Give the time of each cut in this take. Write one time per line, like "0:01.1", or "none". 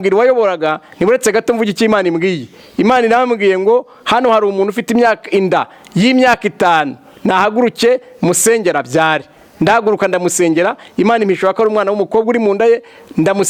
none